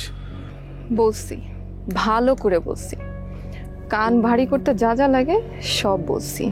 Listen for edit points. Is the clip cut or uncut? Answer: uncut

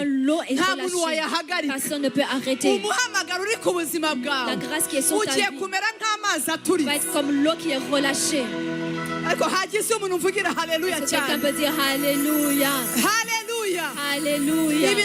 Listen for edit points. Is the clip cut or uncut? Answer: uncut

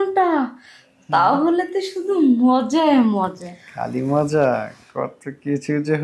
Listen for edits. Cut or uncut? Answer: uncut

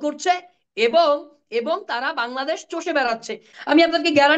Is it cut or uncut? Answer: cut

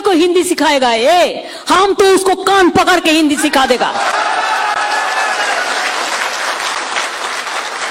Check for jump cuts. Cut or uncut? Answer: uncut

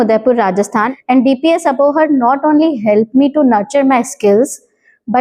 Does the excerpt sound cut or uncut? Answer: cut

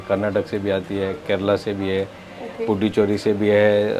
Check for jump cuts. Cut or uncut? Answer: uncut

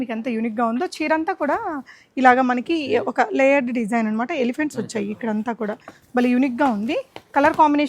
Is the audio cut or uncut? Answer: uncut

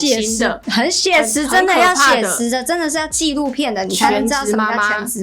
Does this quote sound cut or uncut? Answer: uncut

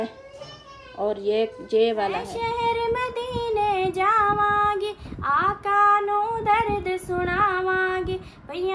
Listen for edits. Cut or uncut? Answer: cut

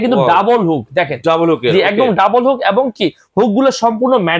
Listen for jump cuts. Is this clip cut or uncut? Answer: uncut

